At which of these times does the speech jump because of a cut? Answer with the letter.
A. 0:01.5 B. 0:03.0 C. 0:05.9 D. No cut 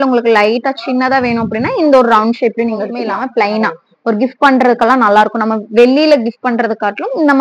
B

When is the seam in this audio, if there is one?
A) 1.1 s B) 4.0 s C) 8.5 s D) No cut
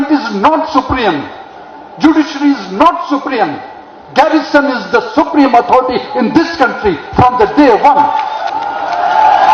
C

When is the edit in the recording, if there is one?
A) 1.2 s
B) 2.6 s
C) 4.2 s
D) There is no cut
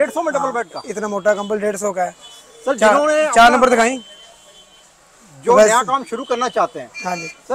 D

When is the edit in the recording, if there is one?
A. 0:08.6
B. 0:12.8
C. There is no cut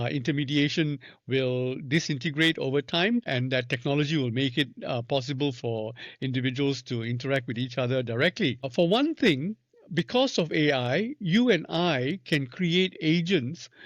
A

